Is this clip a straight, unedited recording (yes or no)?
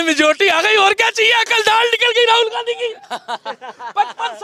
yes